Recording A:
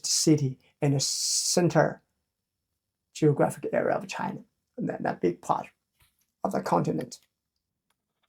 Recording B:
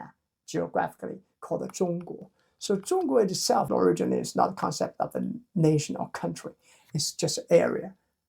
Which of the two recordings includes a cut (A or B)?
B